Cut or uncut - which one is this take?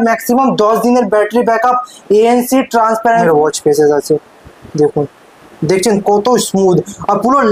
cut